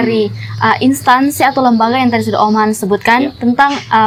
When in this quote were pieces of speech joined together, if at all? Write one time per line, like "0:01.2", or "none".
none